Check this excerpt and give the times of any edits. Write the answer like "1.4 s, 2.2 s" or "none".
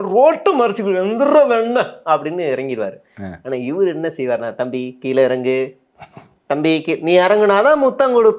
none